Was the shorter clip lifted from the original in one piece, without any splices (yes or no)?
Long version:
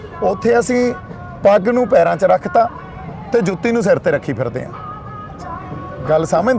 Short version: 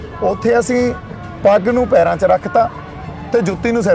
yes